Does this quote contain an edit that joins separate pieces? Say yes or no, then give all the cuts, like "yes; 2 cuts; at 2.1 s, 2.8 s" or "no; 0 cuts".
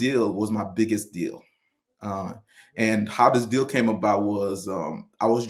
no; 0 cuts